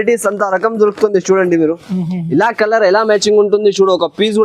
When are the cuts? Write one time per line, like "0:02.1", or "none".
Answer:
none